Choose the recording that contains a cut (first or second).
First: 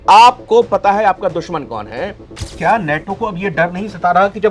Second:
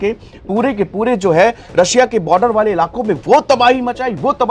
first